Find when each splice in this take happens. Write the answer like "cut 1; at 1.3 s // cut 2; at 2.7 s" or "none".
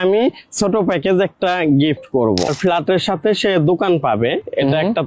cut 1; at 2.5 s